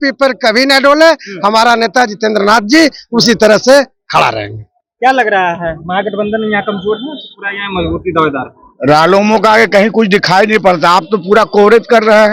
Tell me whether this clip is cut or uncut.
uncut